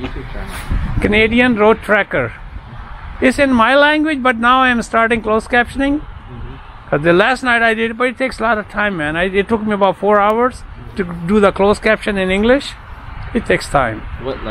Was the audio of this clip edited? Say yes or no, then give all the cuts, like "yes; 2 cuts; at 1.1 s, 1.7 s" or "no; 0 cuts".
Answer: no; 0 cuts